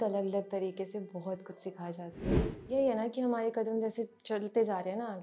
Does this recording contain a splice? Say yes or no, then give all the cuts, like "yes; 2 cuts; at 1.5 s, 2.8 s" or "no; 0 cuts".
yes; 1 cut; at 2.3 s